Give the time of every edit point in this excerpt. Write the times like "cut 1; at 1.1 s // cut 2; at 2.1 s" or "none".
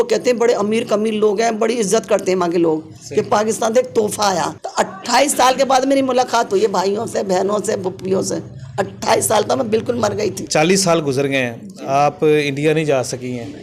cut 1; at 4.6 s // cut 2; at 10.4 s